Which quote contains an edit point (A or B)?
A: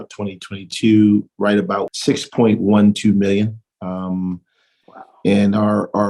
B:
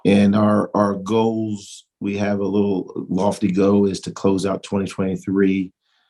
A